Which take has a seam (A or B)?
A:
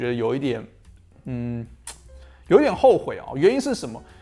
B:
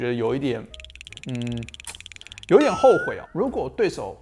B